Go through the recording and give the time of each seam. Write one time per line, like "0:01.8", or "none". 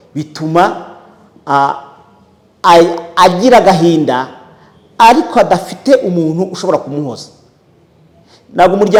none